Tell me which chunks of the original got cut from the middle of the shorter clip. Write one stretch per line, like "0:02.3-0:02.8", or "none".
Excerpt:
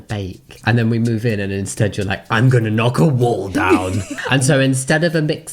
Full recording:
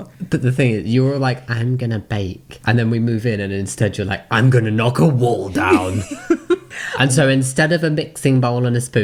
0:06.1-0:06.8